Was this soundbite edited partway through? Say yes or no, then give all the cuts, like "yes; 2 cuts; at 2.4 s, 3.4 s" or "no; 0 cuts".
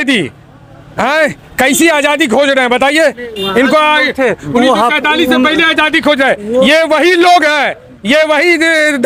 no; 0 cuts